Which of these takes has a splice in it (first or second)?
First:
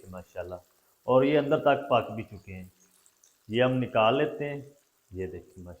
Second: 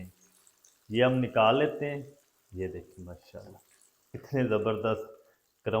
second